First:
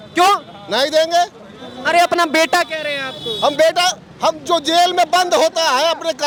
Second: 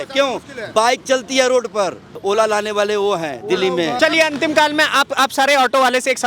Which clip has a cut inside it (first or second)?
second